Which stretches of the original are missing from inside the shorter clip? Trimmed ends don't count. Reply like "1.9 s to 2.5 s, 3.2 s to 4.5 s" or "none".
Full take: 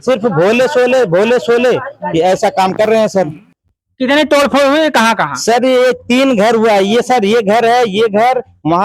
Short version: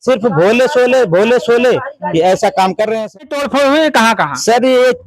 3.4 s to 4.4 s